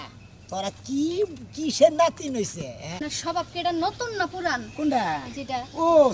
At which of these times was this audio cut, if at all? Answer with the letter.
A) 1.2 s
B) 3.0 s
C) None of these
B